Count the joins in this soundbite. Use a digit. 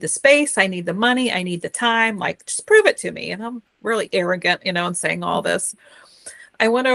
0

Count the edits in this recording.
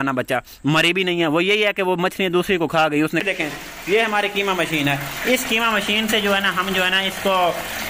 1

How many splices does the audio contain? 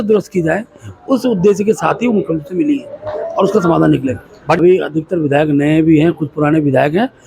1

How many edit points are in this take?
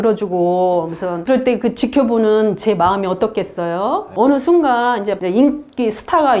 3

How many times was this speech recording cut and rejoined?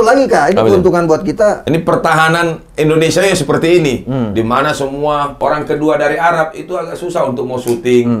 2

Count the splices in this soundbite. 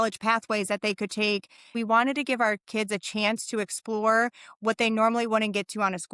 1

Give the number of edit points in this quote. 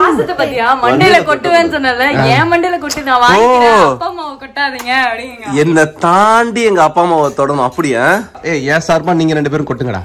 1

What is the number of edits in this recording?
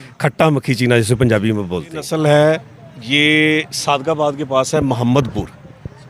1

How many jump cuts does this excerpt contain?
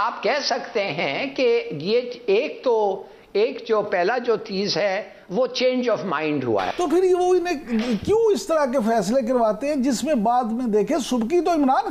0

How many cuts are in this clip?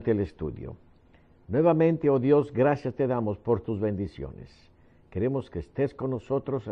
1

